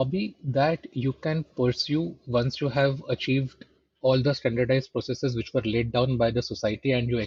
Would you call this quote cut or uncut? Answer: uncut